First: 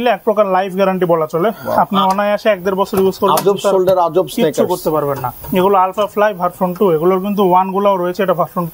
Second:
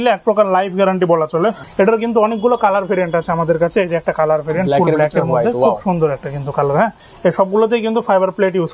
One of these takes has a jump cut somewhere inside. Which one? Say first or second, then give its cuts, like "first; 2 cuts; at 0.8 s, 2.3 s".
second; 2 cuts; at 1.6 s, 7.1 s